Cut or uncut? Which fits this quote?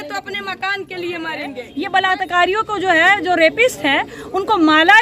cut